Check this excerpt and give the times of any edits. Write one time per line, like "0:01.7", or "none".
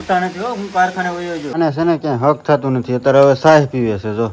0:01.5